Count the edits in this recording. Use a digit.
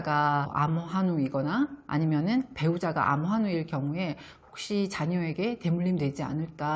0